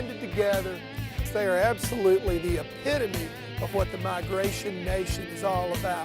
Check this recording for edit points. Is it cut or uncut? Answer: cut